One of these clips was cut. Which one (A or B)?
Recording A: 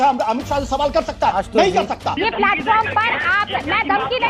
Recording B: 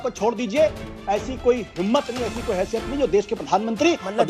A